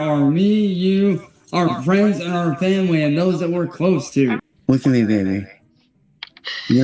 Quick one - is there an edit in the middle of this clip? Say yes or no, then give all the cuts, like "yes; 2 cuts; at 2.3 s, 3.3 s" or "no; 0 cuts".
yes; 1 cut; at 4.5 s